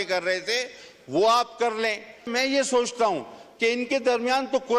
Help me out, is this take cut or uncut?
cut